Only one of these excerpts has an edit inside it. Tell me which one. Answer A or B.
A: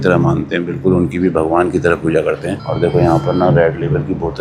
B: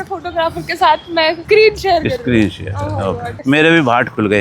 B